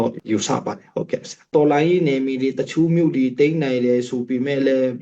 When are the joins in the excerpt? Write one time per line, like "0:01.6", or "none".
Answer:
0:01.4